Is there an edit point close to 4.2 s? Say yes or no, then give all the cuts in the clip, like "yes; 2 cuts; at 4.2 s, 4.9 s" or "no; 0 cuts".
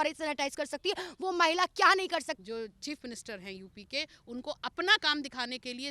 no; 1 cut; at 2.3 s